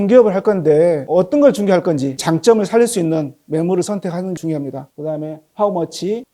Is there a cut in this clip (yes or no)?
yes